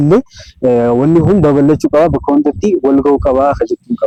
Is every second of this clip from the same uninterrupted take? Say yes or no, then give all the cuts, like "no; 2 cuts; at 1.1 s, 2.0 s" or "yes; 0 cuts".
yes; 0 cuts